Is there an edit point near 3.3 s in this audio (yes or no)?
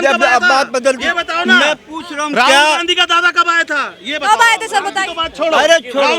no